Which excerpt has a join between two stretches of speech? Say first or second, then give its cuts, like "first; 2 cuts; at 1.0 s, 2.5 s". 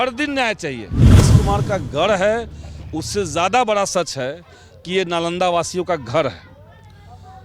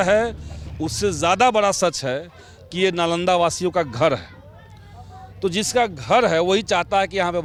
first; 1 cut; at 1.2 s